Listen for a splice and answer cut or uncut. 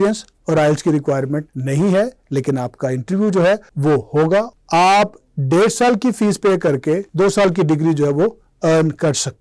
cut